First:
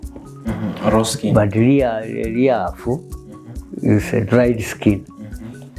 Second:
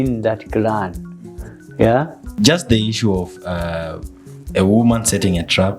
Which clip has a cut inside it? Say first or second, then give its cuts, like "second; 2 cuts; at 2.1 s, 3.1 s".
second; 1 cut; at 2.4 s